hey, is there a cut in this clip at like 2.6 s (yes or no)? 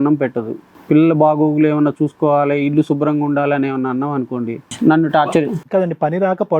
no